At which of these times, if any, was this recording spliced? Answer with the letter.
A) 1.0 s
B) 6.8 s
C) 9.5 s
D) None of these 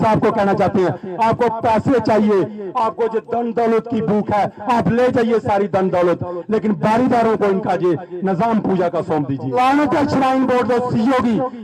C